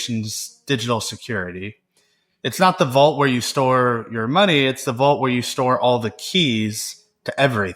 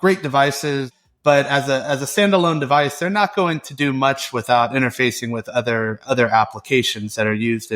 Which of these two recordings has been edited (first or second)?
second